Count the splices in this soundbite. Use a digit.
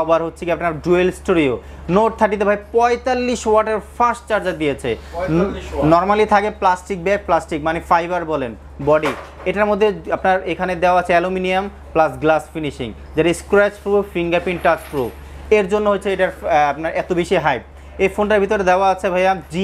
0